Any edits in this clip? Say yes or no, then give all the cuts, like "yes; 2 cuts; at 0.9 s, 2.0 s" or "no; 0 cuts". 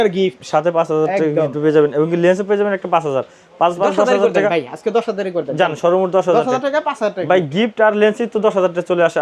no; 0 cuts